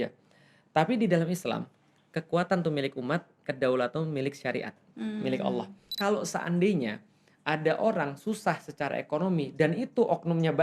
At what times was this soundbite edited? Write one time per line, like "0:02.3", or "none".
0:05.9